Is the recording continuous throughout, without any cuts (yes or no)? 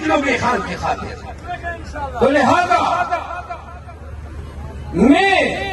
yes